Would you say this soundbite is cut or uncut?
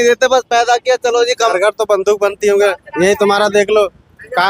cut